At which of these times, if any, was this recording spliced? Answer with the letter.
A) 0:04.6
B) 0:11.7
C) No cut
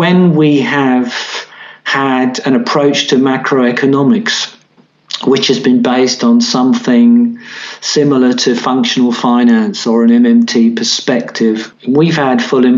B